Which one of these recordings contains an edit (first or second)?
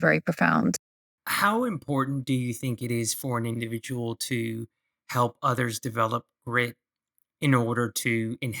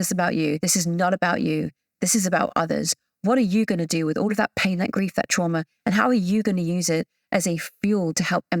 first